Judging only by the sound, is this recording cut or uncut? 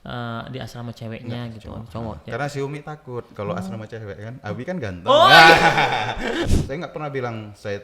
cut